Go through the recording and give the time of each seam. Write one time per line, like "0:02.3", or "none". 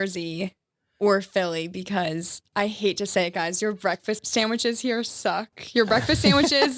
0:04.2